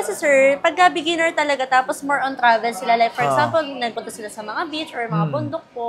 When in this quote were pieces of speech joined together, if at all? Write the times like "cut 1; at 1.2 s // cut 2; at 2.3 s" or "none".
none